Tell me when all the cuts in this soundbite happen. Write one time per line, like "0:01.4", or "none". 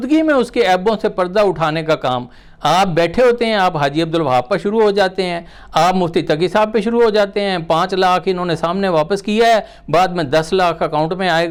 none